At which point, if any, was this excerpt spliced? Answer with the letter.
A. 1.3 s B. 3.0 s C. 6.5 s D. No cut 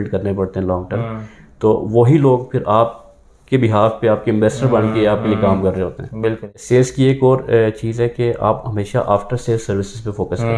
C